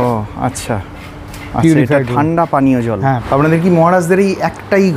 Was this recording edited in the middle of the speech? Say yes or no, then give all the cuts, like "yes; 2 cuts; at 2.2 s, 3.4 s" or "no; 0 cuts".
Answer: yes; 1 cut; at 3.2 s